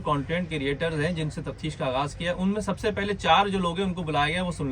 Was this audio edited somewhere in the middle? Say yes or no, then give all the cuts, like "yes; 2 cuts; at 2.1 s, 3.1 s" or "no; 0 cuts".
no; 0 cuts